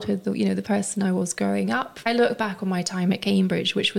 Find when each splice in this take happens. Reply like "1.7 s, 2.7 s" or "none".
2.0 s